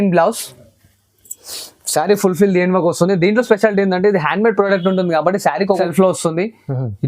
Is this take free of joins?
no; 1 cut; at 5.8 s

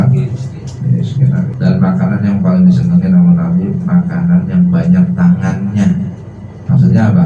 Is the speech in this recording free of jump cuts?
no; 1 cut; at 1.5 s

